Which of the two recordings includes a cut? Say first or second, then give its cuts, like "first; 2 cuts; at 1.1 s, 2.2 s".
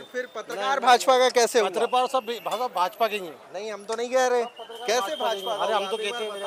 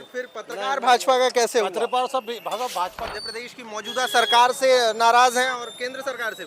second; 1 cut; at 2.9 s